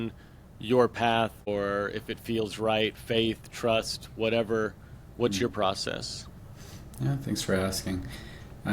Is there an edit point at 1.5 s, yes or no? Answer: yes